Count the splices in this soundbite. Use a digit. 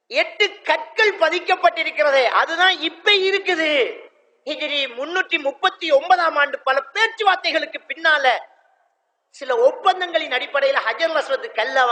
0